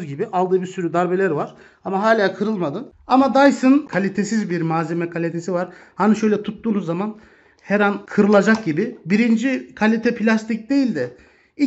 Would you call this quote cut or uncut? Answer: cut